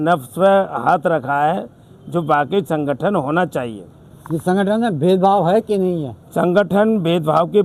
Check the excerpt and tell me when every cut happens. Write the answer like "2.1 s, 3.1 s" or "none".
none